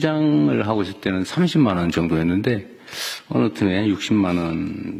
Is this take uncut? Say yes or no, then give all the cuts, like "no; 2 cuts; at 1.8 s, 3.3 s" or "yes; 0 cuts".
yes; 0 cuts